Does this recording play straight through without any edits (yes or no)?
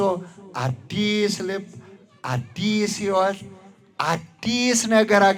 yes